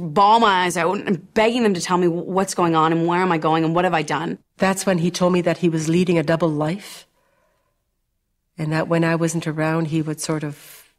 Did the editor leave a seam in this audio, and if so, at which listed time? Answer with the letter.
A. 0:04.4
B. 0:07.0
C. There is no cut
A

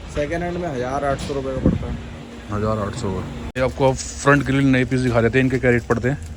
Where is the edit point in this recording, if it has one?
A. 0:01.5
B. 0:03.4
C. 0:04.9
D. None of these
D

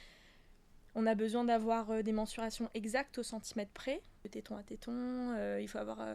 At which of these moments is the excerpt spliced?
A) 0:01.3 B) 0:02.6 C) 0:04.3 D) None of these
C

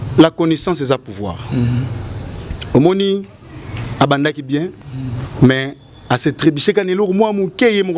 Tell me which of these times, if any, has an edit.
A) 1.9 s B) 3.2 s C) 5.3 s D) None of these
D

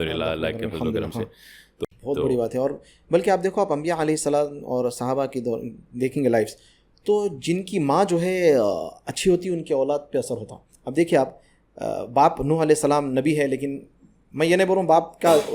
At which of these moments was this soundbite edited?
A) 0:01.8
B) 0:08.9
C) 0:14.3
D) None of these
A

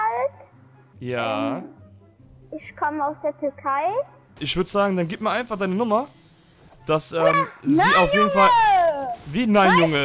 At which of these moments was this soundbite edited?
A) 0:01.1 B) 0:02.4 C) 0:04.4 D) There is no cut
C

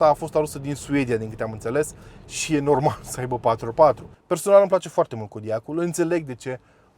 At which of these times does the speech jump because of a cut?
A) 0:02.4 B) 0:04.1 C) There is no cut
B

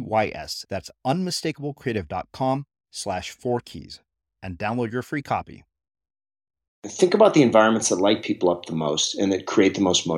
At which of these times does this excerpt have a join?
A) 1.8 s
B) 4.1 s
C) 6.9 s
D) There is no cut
C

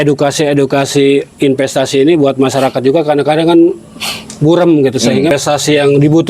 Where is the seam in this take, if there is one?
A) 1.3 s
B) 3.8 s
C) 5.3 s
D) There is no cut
C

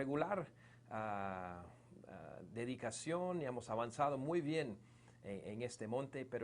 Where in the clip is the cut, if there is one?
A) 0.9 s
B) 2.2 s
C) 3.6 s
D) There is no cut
C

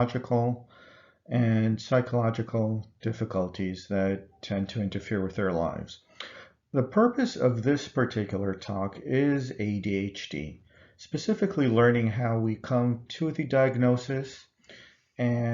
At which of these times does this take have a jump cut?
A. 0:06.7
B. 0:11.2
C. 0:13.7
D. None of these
B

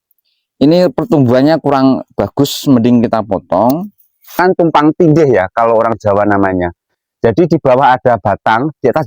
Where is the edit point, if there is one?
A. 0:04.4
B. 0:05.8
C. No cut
A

